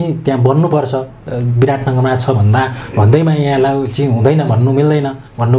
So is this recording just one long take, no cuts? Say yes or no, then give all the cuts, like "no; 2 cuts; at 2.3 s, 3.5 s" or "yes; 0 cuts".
yes; 0 cuts